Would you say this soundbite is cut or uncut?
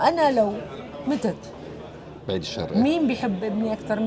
uncut